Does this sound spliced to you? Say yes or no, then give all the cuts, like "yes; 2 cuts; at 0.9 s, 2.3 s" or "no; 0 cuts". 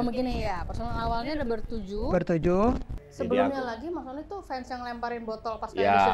yes; 1 cut; at 3.0 s